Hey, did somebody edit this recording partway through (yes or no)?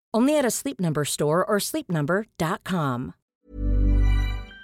yes